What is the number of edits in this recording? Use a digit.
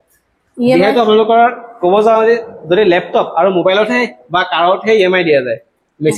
0